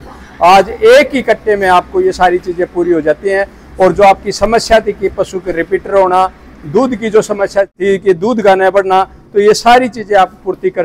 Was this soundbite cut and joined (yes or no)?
no